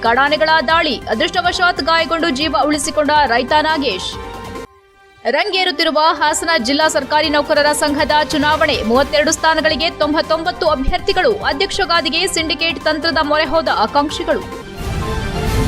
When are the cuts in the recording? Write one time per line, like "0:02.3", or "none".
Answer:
0:14.5